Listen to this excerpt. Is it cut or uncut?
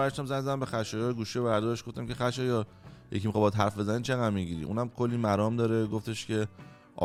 uncut